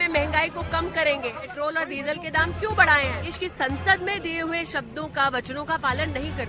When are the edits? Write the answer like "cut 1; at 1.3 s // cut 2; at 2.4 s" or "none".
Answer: cut 1; at 1.5 s // cut 2; at 3.2 s